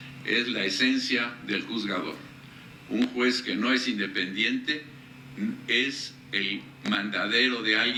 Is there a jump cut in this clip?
no; 0 cuts

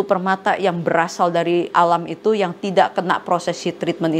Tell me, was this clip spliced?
yes; 1 cut; at 1.7 s

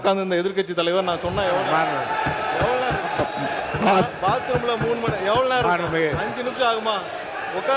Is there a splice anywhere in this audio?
no; 0 cuts

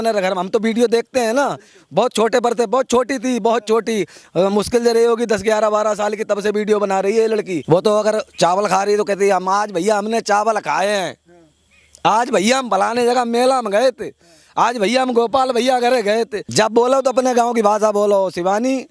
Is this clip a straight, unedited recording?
no; 2 cuts; at 7.6 s, 16.4 s

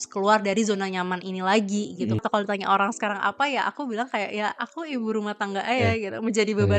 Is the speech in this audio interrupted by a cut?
yes; 1 cut; at 2.2 s

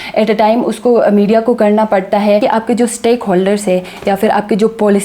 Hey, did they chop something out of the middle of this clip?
yes; 1 cut; at 2.4 s

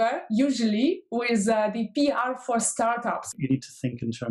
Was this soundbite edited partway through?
yes; 1 cut; at 3.3 s

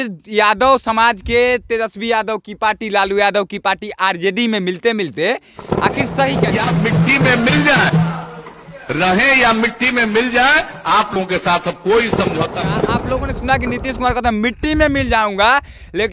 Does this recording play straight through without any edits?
no; 2 cuts; at 6.4 s, 12.9 s

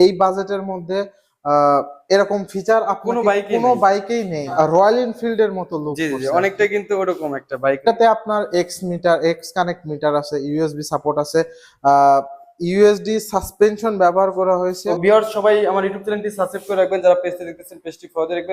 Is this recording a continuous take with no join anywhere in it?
no; 3 cuts; at 4.5 s, 7.8 s, 14.9 s

